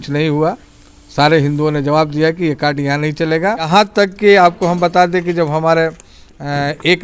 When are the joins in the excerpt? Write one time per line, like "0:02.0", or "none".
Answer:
0:03.7